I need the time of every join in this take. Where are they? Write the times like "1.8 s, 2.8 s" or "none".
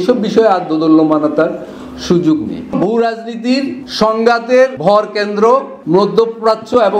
2.7 s, 3.8 s, 4.8 s, 5.7 s